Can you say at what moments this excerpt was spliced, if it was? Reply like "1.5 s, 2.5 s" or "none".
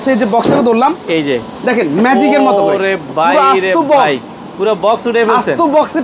none

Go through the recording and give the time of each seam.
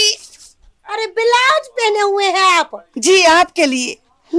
none

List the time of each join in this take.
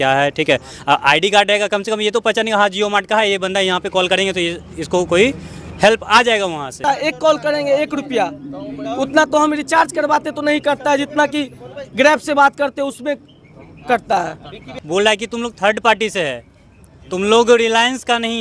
6.8 s, 14.7 s

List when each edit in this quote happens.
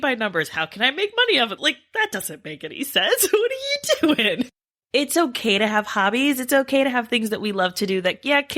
4.7 s

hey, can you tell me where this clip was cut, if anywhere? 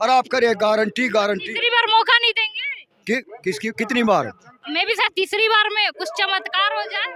none

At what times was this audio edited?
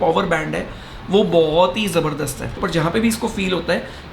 2.6 s

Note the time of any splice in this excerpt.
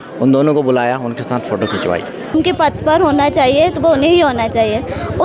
2.3 s

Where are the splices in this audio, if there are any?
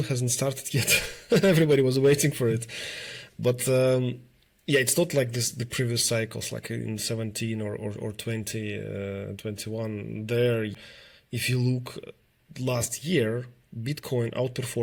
none

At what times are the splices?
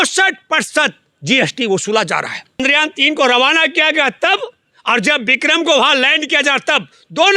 2.6 s

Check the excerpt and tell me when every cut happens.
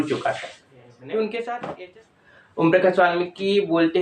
1.7 s

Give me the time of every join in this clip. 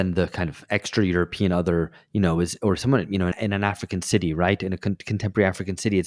none

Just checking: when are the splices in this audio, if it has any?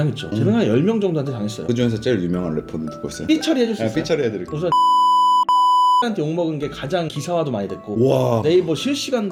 none

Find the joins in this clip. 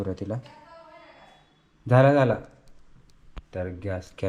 none

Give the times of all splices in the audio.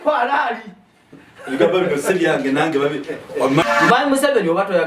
3.6 s

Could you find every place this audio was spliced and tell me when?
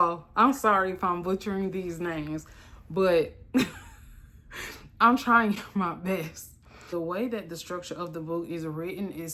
6.9 s

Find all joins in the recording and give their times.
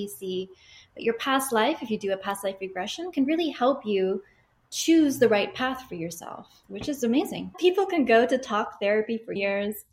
7.5 s

